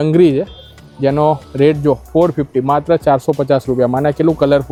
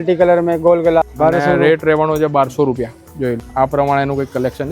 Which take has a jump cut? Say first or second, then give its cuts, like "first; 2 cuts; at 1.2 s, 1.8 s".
second; 2 cuts; at 1.1 s, 3.5 s